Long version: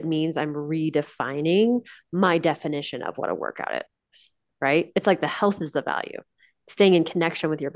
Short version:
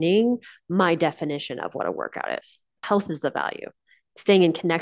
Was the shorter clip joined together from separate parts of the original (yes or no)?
yes